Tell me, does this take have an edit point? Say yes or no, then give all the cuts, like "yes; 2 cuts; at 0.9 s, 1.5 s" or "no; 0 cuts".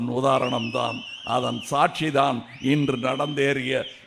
no; 0 cuts